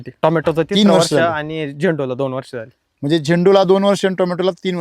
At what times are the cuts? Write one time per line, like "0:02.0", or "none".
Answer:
none